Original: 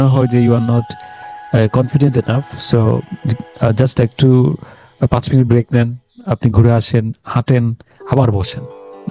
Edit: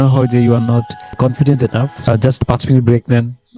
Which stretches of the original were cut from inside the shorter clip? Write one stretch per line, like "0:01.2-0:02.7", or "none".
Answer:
0:01.2-0:01.7
0:02.6-0:04.7